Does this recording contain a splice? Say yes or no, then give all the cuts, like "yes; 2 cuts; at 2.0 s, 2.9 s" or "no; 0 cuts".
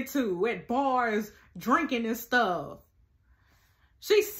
no; 0 cuts